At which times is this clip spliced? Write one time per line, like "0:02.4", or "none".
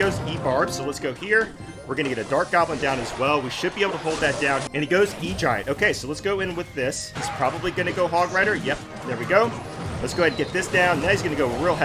0:04.7
0:07.1

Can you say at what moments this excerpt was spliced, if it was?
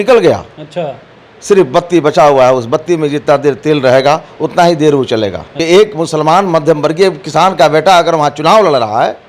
0:05.5

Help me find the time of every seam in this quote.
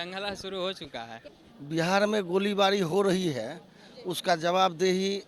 0:01.2

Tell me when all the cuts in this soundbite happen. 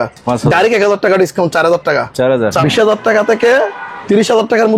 0:02.6

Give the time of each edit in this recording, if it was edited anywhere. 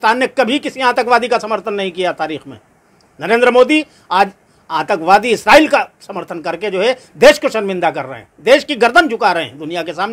none

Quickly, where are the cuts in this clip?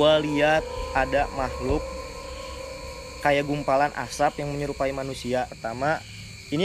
0:05.6

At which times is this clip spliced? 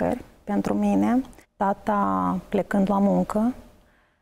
0:01.4

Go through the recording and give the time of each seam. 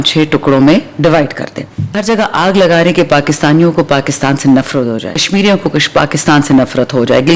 0:01.9
0:05.3

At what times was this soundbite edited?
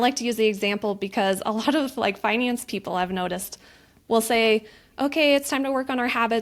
none

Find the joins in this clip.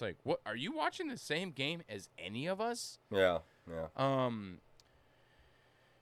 none

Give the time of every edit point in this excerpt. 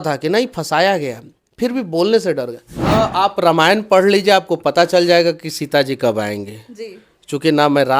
0:02.9

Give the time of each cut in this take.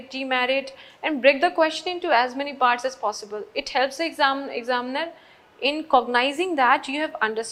none

